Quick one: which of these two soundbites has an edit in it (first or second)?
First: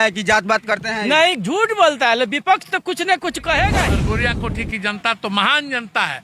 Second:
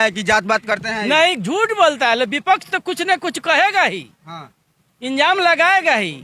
first